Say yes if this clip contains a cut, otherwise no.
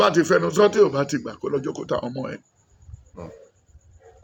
no